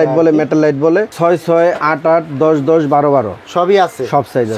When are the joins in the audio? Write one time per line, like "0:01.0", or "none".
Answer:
0:01.1